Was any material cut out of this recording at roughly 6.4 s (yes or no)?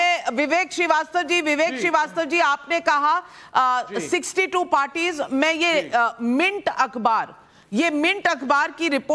no